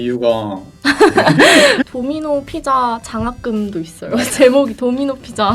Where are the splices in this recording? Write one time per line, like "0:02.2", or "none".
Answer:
0:01.8